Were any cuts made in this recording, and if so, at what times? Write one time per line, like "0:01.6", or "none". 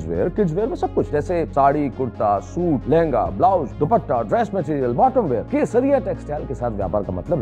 0:01.2
0:02.8
0:03.7
0:05.4